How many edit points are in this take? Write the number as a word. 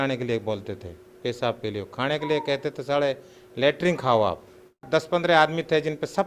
one